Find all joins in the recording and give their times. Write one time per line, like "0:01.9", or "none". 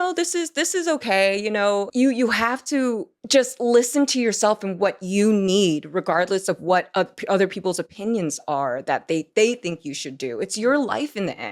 0:01.9
0:03.1